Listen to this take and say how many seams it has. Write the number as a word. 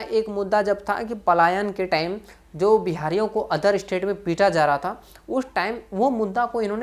zero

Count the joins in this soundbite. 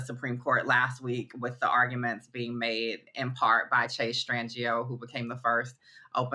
zero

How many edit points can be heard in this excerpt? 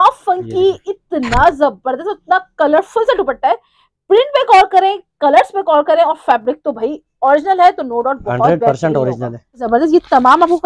one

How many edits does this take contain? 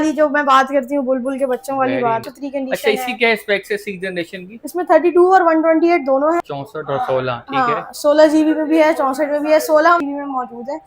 three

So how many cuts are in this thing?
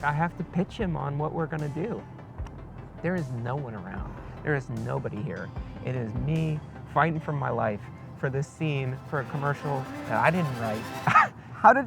one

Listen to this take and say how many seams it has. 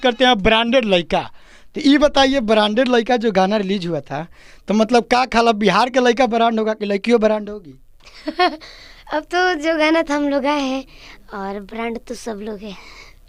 zero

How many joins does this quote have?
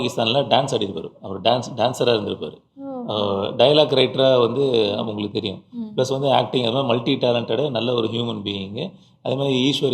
zero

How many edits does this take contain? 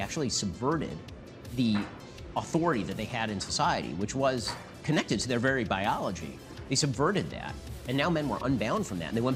zero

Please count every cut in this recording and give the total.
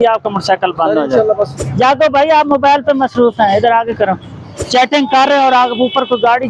two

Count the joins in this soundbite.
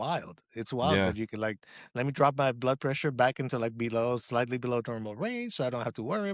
zero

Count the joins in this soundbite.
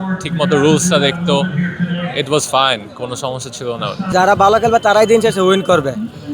one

